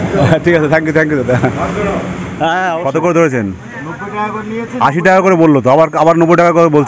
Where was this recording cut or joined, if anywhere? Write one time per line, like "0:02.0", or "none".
0:02.8